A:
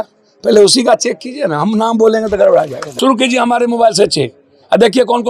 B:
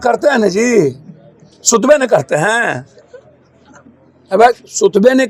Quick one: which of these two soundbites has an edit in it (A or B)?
A